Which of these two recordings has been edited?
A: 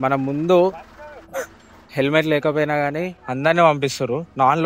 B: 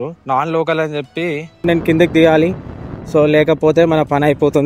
B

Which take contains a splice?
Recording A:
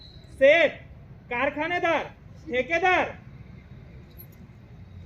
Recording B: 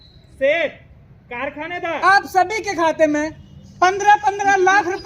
B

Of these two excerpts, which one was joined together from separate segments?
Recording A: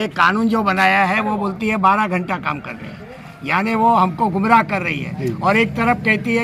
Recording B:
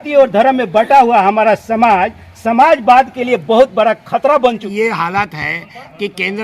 B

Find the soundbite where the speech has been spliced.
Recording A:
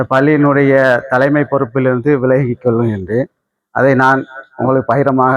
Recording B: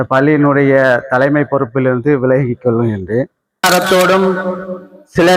B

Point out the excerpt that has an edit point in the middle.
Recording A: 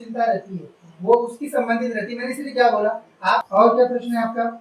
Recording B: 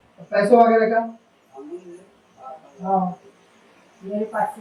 A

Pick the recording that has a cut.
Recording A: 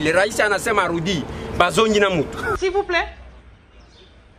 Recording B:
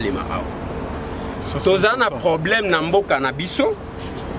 A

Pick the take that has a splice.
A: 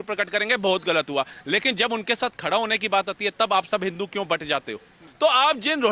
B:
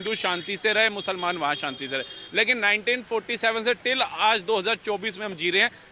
A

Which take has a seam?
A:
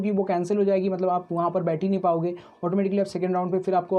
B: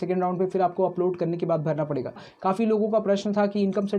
B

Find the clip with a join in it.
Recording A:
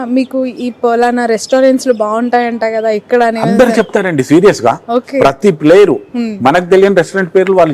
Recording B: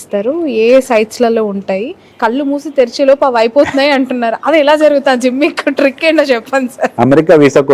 B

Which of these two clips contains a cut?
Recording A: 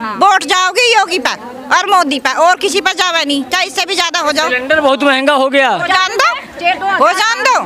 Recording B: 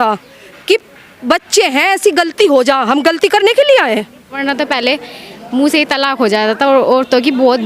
B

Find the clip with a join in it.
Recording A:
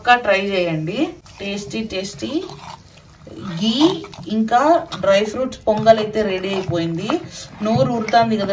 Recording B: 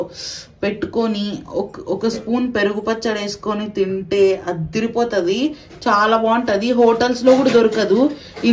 A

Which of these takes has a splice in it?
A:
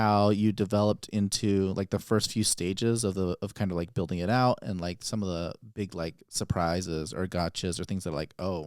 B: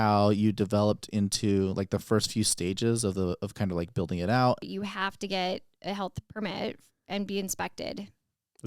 B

